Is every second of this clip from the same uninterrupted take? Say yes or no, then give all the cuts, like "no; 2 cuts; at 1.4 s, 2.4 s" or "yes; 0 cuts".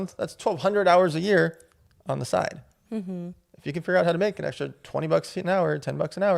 yes; 0 cuts